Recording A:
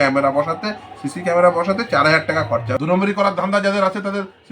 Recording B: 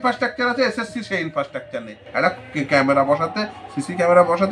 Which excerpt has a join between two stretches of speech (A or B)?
A